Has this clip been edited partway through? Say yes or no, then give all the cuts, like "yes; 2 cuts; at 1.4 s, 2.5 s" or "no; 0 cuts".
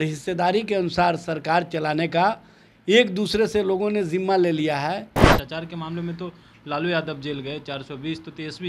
yes; 1 cut; at 5.2 s